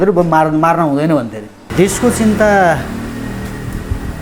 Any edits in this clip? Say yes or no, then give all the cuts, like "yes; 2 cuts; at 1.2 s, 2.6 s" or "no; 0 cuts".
yes; 1 cut; at 1.6 s